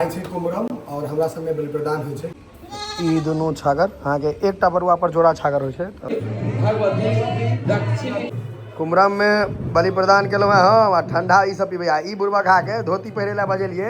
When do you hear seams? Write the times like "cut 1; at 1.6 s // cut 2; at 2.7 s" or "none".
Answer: cut 1; at 2.4 s // cut 2; at 6.1 s // cut 3; at 8.3 s